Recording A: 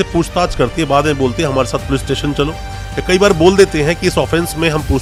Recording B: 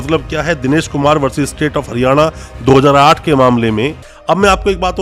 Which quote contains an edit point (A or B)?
B